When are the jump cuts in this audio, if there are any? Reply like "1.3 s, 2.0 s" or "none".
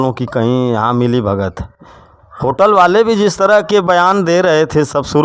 none